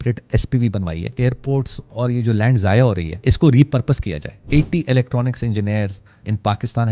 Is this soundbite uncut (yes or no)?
no